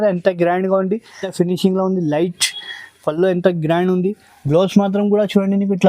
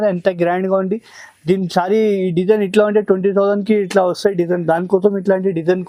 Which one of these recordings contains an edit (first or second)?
first